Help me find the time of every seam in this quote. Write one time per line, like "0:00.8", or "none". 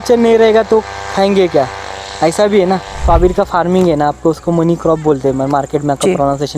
0:03.0